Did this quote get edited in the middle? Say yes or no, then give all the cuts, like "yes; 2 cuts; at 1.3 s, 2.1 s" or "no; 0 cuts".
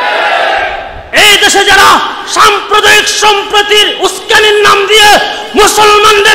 yes; 1 cut; at 1.0 s